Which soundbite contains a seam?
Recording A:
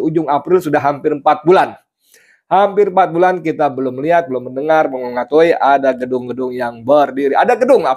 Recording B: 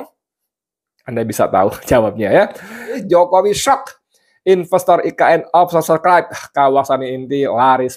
B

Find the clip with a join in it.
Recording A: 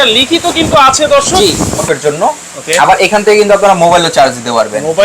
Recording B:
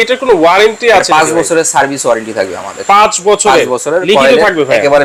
A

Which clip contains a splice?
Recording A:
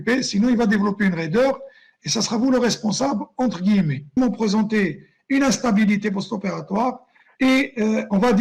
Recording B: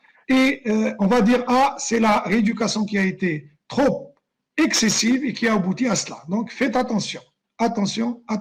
A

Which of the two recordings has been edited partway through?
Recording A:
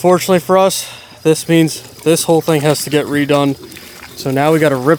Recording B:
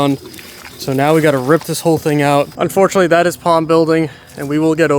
B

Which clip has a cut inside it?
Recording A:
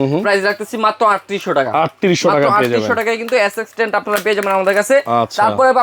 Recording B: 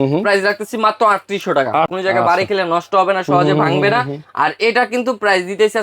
B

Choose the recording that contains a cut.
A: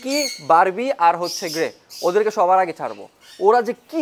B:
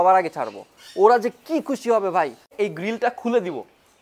B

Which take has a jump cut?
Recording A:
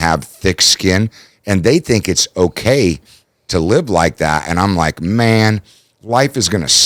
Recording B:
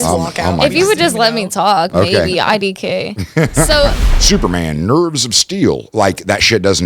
B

